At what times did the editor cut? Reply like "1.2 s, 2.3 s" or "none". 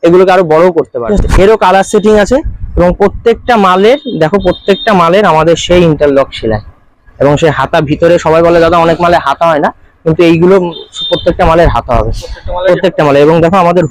1.0 s